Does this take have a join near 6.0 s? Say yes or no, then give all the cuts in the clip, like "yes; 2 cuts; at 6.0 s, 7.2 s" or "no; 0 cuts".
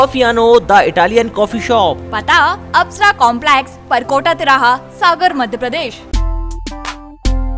yes; 1 cut; at 6.0 s